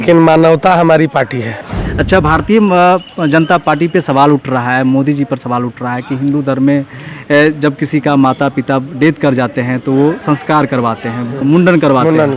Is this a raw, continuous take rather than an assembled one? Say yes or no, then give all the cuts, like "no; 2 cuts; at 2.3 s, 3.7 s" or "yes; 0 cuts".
yes; 0 cuts